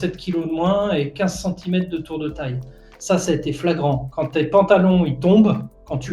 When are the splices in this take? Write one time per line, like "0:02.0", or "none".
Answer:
none